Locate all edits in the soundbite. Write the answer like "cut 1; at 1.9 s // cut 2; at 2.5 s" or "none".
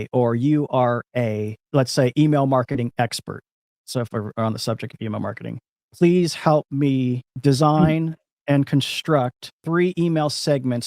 cut 1; at 1.5 s // cut 2; at 7.3 s // cut 3; at 9.5 s